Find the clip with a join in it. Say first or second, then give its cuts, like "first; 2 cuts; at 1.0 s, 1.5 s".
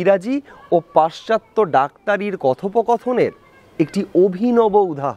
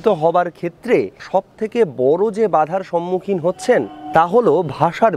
second; 2 cuts; at 1.2 s, 4.0 s